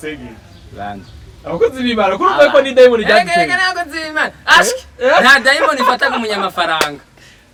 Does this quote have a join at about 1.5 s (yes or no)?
no